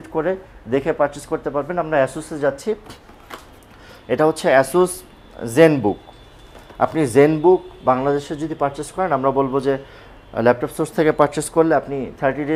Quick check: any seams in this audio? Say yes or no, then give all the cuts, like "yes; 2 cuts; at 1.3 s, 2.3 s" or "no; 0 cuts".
no; 0 cuts